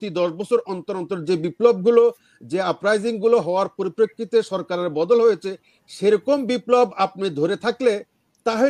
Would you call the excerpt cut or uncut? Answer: uncut